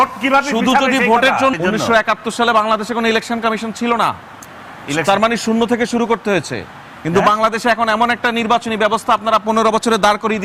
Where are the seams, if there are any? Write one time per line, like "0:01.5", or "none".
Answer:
0:01.5